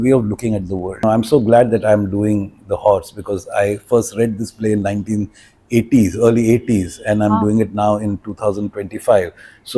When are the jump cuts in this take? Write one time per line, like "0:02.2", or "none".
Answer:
0:01.0